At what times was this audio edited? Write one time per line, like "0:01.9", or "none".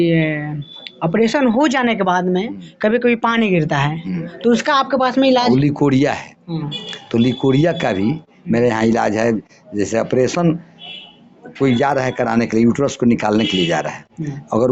none